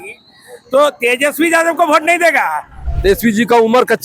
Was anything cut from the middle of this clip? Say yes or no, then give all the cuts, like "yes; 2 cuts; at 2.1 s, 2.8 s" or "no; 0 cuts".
yes; 1 cut; at 2.9 s